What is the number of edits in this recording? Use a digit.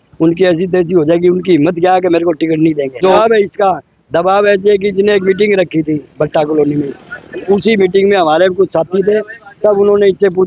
1